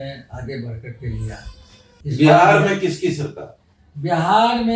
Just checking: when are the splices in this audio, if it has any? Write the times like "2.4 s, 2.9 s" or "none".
1.9 s